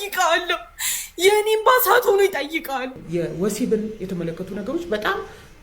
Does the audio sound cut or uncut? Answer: cut